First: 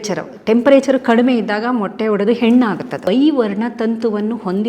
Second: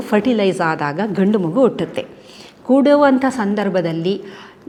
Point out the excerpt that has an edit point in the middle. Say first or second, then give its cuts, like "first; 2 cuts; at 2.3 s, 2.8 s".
first; 1 cut; at 2.9 s